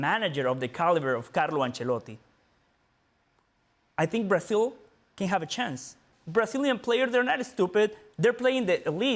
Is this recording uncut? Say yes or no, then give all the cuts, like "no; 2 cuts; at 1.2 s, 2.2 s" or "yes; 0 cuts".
no; 1 cut; at 6.1 s